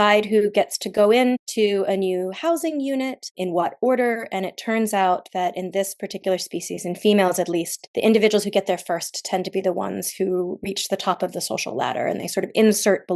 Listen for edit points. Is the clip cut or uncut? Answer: cut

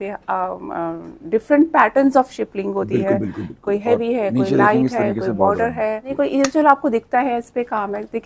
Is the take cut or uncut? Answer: cut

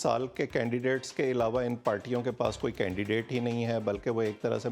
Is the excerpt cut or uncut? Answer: uncut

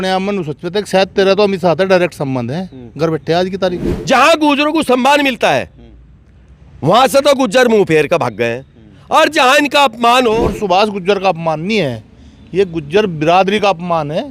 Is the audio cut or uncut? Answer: cut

